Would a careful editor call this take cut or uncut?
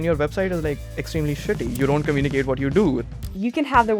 cut